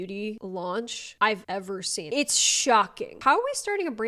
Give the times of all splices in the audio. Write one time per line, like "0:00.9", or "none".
0:03.1